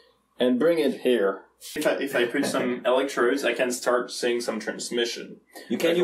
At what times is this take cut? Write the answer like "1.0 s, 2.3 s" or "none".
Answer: 1.8 s

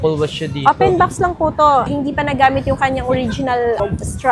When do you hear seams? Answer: none

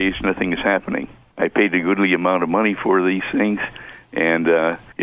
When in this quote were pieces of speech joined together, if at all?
none

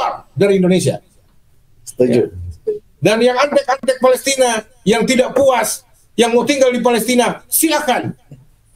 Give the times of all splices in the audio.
2.4 s

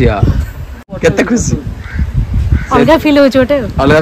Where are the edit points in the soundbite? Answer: 0.9 s

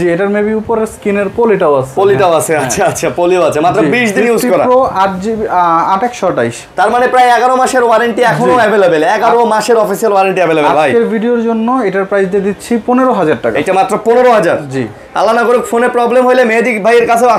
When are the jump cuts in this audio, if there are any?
none

